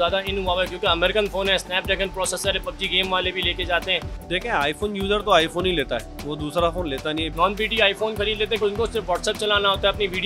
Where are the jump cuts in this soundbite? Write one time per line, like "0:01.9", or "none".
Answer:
0:04.2
0:07.3
0:08.6